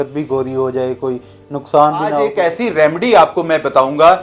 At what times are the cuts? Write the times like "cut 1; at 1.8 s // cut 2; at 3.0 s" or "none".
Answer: cut 1; at 2.3 s